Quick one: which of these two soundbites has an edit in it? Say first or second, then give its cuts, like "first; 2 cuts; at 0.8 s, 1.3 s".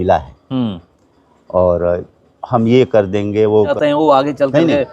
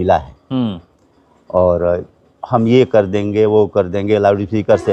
first; 1 cut; at 3.7 s